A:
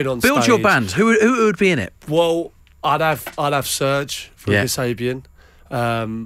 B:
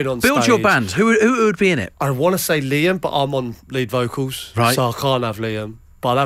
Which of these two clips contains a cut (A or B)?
B